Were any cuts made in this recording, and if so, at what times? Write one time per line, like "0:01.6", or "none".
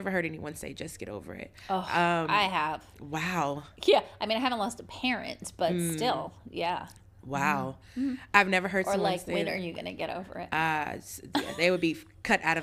none